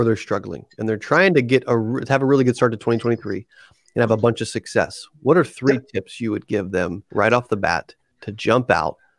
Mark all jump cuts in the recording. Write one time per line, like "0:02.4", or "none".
0:07.0